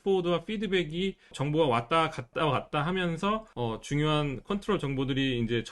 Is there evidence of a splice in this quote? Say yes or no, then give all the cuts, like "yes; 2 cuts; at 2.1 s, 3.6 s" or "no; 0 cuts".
yes; 3 cuts; at 1.4 s, 2.3 s, 3.5 s